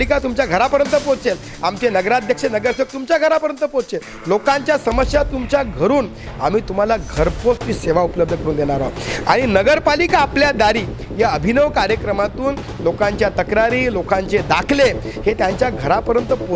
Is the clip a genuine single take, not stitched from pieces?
yes; 0 cuts

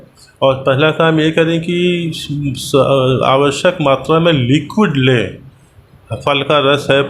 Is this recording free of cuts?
yes; 0 cuts

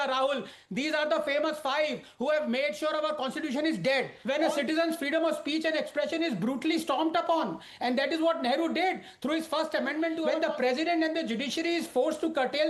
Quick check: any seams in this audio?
yes; 2 cuts; at 4.1 s, 10.3 s

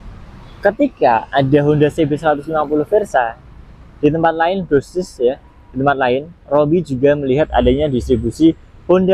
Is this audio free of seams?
yes; 0 cuts

